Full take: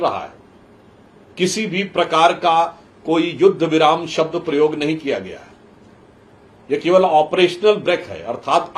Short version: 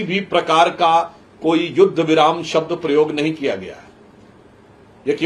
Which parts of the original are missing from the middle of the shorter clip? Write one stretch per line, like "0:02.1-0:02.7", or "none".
none